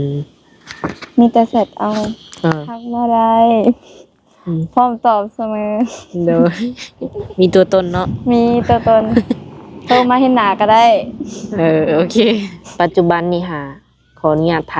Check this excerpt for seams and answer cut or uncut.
cut